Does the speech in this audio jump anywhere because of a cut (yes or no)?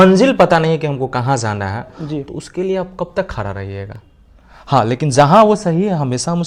no